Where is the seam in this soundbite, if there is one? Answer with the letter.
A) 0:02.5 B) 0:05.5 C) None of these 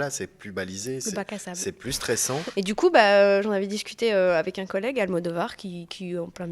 A